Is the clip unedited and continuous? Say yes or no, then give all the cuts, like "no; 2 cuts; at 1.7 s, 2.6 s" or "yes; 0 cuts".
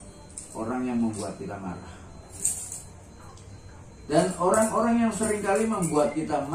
no; 1 cut; at 2.4 s